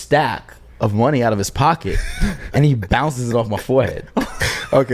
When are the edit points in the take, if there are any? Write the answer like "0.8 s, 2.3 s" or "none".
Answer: none